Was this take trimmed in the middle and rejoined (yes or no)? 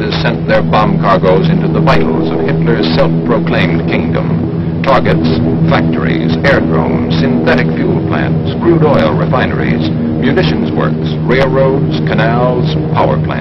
no